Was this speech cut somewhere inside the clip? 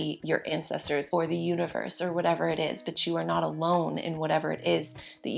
yes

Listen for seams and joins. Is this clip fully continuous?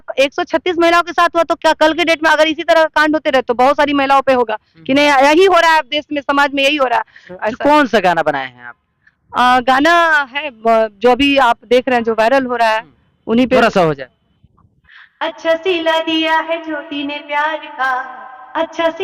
yes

